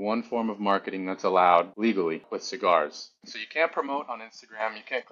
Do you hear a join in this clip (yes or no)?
yes